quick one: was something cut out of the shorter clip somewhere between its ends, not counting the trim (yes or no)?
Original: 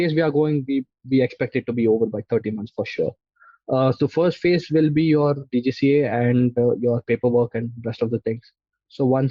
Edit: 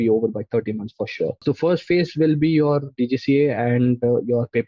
yes